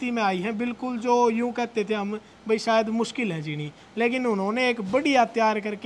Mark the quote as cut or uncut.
uncut